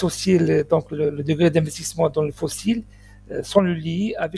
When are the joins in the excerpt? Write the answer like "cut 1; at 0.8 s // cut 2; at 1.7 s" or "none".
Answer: none